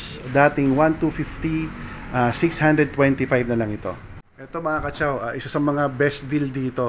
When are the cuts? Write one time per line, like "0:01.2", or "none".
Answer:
0:04.4